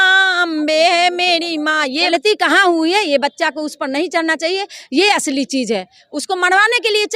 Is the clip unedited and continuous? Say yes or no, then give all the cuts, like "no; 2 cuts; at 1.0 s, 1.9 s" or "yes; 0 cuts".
no; 1 cut; at 2.1 s